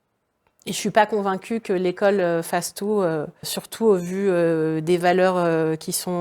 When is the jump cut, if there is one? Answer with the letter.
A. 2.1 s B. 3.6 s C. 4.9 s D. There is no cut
B